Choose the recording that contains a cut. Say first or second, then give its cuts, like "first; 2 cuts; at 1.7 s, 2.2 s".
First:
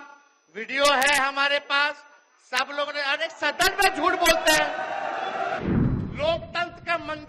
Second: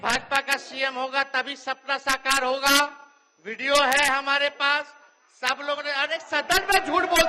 first; 1 cut; at 5.6 s